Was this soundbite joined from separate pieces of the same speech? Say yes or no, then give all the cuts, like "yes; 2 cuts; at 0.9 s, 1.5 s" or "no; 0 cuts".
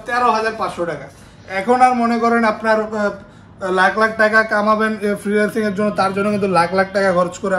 no; 0 cuts